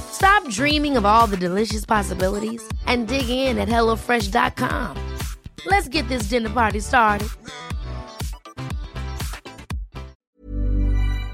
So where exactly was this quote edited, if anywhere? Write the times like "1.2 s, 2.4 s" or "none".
10.3 s